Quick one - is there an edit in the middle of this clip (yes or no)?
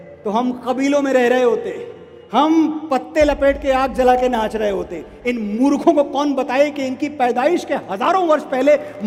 no